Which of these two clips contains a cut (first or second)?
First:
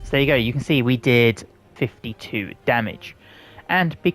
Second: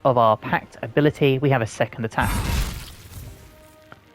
first